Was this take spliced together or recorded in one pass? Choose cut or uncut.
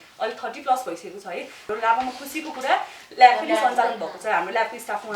cut